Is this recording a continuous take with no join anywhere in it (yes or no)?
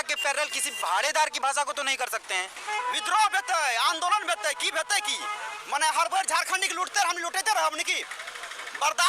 no